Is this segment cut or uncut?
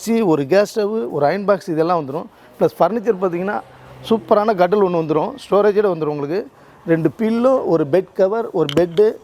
uncut